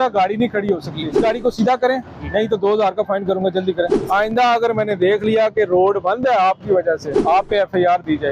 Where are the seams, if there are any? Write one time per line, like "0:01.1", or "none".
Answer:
0:01.2
0:03.9
0:07.1